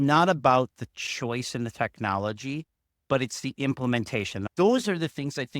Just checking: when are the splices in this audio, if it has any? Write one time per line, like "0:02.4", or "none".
0:04.4